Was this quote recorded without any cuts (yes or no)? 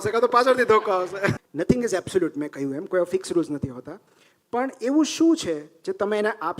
no